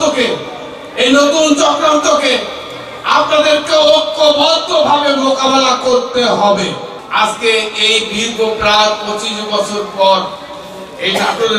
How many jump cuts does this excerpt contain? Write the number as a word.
one